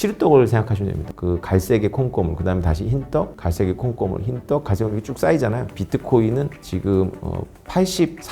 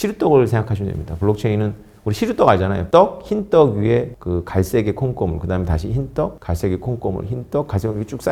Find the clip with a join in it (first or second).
first